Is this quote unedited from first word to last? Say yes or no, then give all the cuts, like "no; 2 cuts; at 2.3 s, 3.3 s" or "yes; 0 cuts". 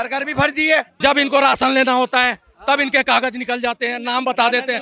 no; 1 cut; at 0.9 s